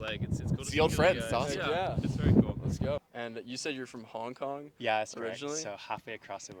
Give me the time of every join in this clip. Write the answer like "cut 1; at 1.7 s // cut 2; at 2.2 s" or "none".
cut 1; at 3.0 s